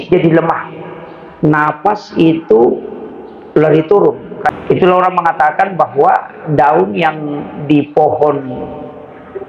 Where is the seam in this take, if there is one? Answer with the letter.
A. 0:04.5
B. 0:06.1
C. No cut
A